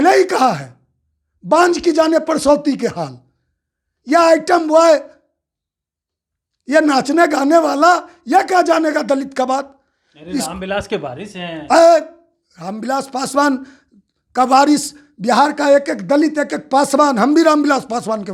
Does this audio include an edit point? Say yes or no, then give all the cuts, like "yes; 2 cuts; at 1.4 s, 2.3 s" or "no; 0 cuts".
no; 0 cuts